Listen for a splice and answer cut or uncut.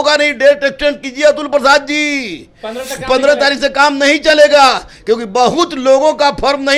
uncut